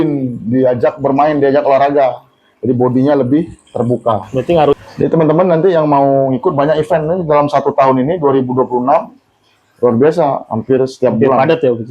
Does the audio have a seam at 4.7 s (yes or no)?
yes